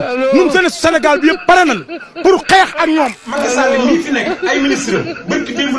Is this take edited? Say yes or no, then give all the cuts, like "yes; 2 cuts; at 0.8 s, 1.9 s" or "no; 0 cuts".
yes; 1 cut; at 3.2 s